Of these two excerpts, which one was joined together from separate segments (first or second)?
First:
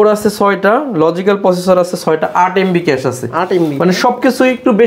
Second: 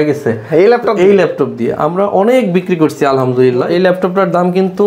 second